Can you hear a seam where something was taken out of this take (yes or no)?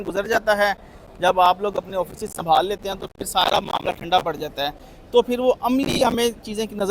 no